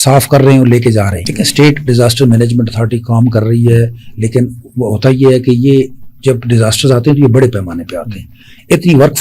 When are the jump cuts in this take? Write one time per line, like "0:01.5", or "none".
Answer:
0:01.2